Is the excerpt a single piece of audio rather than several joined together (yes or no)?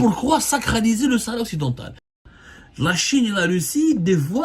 no